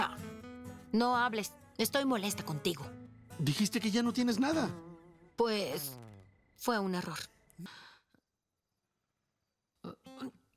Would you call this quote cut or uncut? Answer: cut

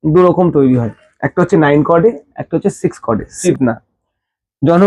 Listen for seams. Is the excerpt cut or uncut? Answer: cut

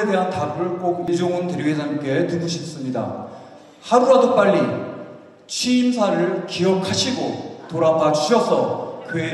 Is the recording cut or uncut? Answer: cut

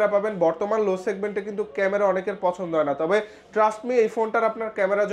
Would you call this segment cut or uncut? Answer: uncut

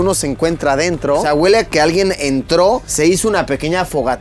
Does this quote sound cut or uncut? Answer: cut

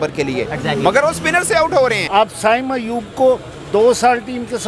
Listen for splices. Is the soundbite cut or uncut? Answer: cut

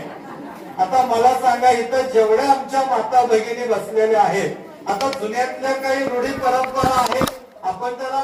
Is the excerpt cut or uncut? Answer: uncut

